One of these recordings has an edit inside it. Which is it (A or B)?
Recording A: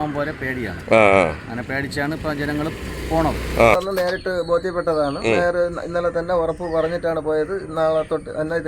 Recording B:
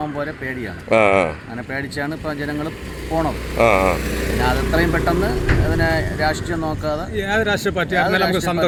A